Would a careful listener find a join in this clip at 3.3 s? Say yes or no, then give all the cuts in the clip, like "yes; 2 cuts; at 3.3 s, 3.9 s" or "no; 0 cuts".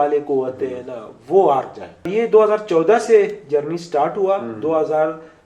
no; 1 cut; at 2.1 s